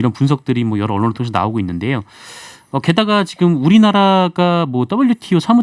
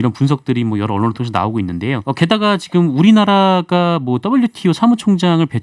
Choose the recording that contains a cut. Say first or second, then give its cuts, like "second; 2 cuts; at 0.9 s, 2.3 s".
second; 1 cut; at 2.0 s